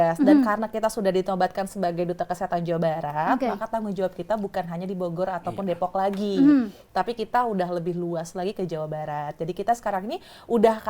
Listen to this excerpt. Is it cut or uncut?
uncut